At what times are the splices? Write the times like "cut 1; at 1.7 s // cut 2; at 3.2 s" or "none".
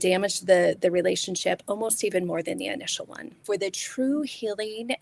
cut 1; at 3.4 s